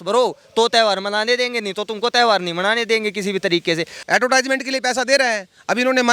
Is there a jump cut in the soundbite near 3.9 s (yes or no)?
yes